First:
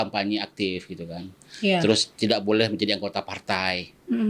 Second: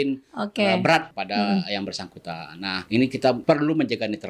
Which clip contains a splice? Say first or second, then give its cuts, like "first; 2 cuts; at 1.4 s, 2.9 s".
second; 3 cuts; at 1.1 s, 2.8 s, 3.4 s